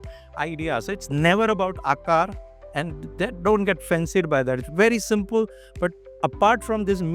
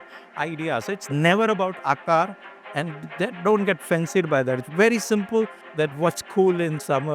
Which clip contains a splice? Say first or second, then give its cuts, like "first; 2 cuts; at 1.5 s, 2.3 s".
second; 1 cut; at 5.6 s